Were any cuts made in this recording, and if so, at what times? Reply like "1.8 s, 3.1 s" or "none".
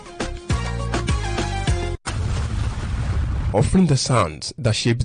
2.0 s